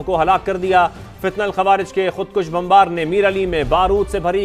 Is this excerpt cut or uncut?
uncut